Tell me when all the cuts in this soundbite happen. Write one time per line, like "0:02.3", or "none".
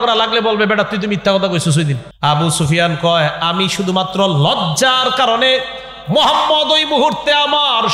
0:02.1